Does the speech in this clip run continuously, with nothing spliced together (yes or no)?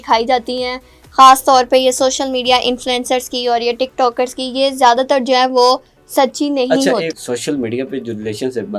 no